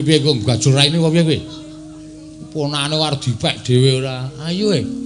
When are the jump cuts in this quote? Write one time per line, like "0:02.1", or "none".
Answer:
none